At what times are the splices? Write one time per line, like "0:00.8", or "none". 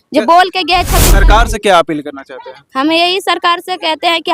0:01.1